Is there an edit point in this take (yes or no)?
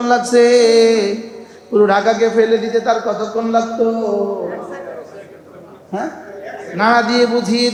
no